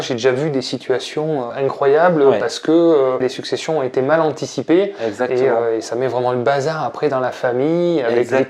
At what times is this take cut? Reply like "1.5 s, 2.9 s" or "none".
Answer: 1.5 s, 3.2 s